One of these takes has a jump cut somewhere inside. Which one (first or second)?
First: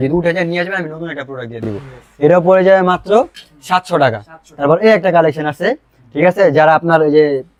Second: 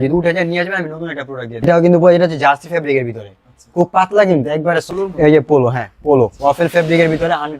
second